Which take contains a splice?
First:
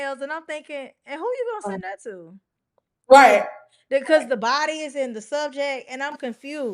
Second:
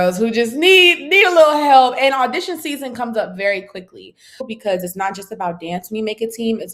second; 1 cut; at 4.5 s

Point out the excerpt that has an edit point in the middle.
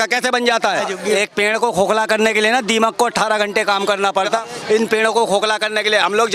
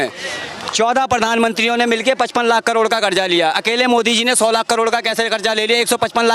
first; 2 cuts; at 0.9 s, 4.6 s

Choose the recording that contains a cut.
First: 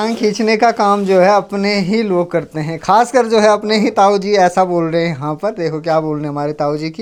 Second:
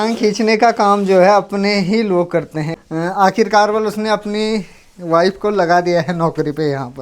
second; 1 cut; at 2.7 s

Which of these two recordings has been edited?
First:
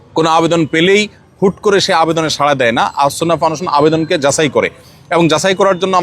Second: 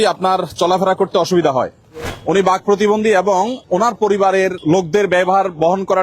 second; 3 cuts; at 2.0 s, 3.6 s, 4.6 s

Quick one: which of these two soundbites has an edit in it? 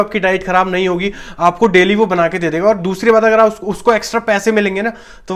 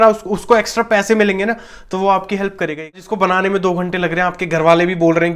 second; 1 cut; at 3.0 s

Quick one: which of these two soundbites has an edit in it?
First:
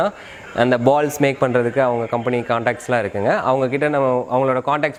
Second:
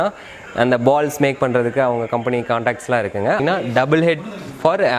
second; 1 cut; at 3.4 s

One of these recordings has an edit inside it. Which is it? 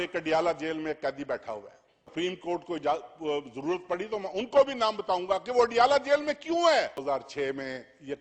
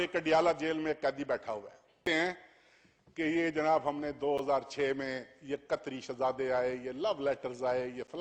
first; 2 cuts; at 2.1 s, 7.0 s

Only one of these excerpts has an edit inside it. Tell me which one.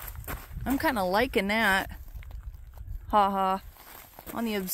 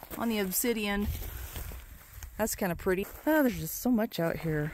second; 1 cut; at 3.0 s

